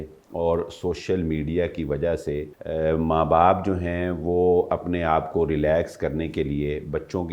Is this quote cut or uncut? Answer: cut